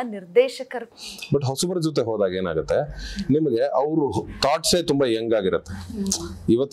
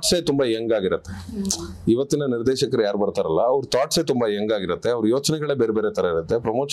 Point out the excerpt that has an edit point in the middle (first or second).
first